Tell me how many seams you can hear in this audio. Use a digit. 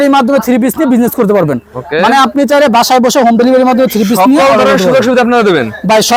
0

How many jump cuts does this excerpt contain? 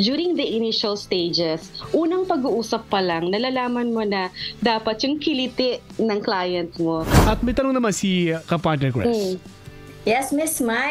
1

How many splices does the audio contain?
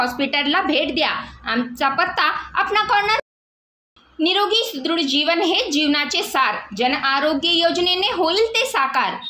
1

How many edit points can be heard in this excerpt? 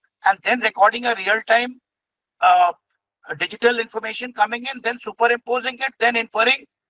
0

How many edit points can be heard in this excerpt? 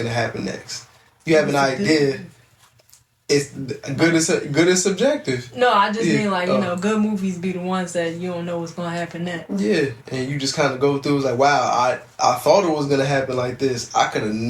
0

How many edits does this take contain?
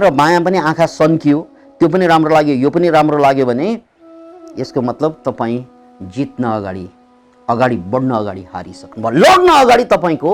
0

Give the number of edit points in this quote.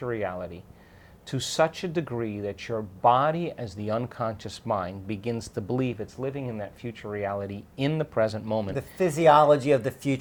0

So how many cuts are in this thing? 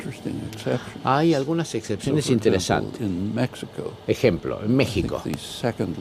0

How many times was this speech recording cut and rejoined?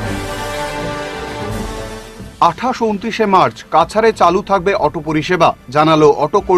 1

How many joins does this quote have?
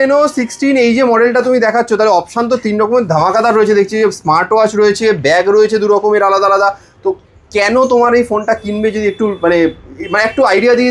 0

